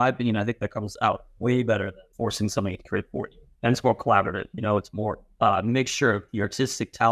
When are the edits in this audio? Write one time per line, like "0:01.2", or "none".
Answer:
0:02.0
0:03.4
0:05.2